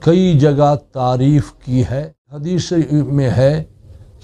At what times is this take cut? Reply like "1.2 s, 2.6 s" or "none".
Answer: 2.5 s